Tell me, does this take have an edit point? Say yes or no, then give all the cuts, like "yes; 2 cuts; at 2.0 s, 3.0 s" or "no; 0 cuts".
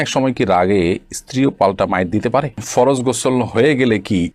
yes; 1 cut; at 2.6 s